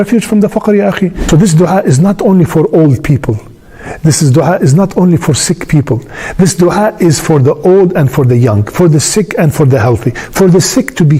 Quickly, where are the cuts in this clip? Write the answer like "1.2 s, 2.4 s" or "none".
1.2 s